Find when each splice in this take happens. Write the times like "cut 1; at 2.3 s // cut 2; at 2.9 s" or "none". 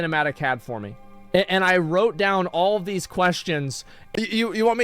cut 1; at 4.0 s